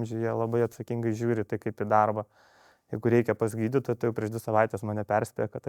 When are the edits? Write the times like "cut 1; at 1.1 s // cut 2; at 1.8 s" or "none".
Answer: none